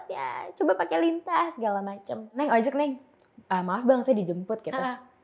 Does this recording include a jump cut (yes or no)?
yes